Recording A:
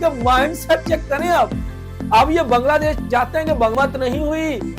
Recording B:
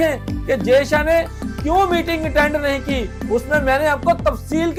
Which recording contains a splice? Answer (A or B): A